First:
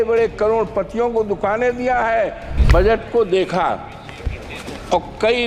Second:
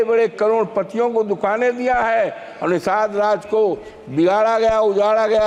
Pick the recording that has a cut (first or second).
first